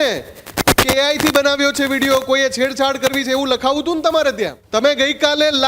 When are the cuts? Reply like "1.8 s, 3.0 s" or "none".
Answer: 4.6 s